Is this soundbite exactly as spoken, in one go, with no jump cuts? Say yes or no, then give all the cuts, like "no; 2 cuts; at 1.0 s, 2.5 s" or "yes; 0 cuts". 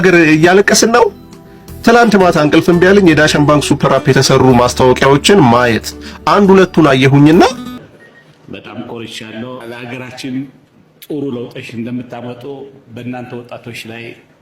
no; 1 cut; at 7.6 s